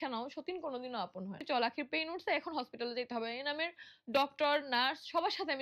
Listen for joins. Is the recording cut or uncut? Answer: cut